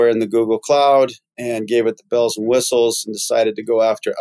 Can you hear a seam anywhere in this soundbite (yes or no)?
no